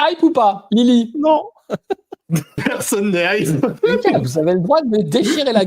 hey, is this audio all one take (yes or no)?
no